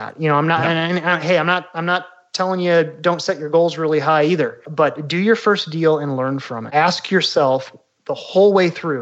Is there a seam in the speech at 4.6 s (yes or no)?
yes